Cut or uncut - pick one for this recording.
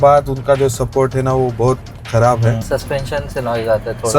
cut